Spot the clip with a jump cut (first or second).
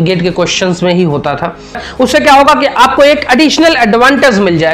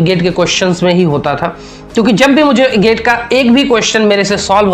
first